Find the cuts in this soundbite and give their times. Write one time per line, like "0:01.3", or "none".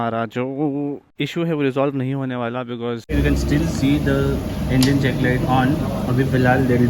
0:01.1
0:03.1